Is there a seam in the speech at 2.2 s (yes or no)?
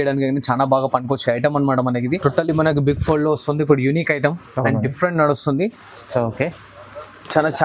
yes